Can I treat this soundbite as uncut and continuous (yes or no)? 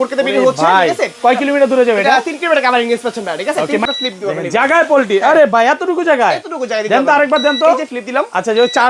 no